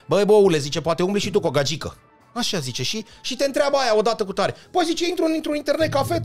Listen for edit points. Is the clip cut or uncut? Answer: uncut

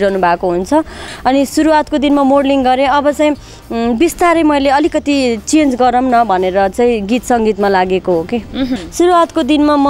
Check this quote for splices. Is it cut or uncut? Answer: cut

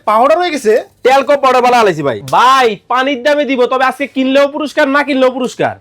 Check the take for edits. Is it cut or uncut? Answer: cut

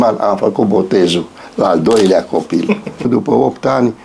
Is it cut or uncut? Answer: cut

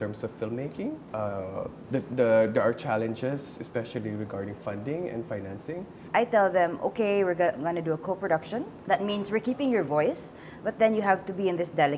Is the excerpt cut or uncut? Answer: cut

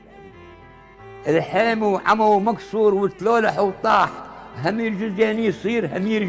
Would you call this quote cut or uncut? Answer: uncut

